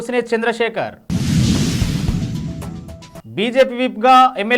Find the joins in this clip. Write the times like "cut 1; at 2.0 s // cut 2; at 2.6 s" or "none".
none